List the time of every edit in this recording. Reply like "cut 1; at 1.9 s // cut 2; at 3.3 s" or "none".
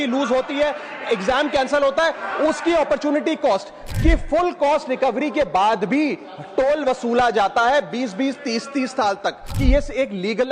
cut 1; at 3.8 s // cut 2; at 9.5 s